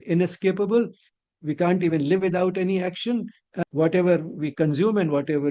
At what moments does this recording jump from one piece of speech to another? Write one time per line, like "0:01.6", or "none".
0:03.5

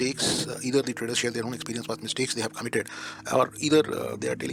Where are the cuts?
none

